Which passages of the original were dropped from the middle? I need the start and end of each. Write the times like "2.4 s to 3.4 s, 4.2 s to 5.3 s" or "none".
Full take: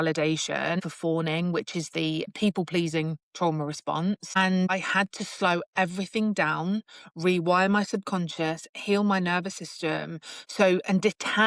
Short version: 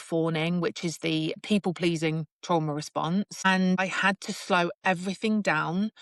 none